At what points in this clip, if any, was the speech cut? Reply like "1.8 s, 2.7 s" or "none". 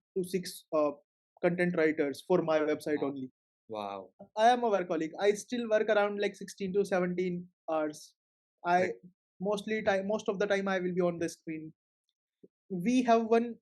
4.3 s, 12.5 s